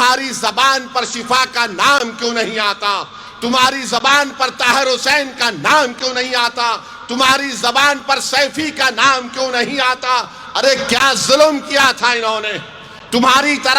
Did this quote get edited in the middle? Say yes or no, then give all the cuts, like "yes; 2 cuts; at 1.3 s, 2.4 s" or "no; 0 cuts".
no; 0 cuts